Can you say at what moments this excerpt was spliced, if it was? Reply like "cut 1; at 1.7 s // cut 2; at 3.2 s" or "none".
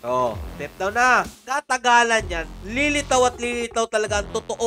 cut 1; at 1.3 s